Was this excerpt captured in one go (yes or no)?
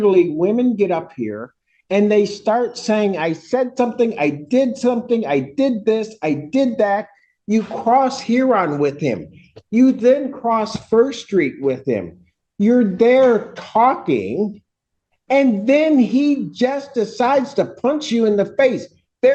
yes